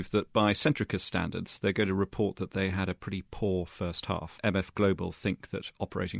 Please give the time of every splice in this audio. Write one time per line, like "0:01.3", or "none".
0:04.3

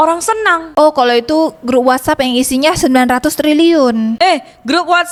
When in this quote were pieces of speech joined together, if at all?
none

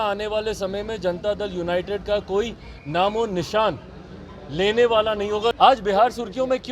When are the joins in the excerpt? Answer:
0:05.6

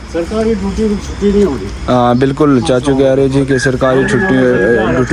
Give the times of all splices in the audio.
none

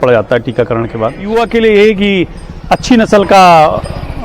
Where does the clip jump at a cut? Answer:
0:01.2

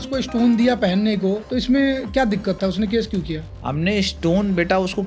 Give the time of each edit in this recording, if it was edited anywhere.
0:01.4

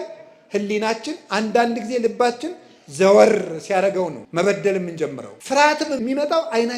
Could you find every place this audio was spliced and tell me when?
0:04.2
0:05.3
0:06.0

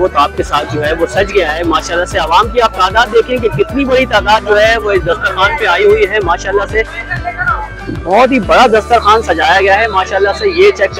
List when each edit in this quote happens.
none

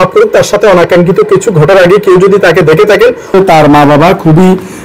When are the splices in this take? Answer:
0:03.3

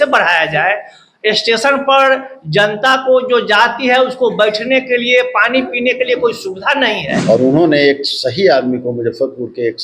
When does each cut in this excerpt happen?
0:07.1

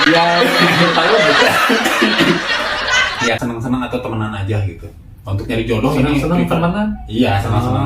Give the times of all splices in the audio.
0:03.4

